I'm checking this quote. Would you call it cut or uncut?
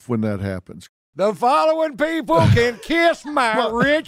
uncut